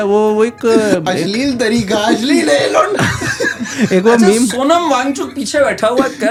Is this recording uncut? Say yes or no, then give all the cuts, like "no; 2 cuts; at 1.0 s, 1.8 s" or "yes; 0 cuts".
yes; 0 cuts